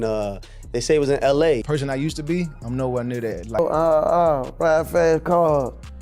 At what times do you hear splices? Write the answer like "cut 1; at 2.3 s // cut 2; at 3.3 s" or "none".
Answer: cut 1; at 1.6 s // cut 2; at 3.6 s